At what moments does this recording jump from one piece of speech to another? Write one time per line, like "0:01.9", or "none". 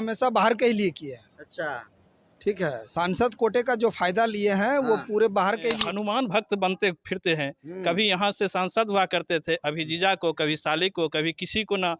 0:05.8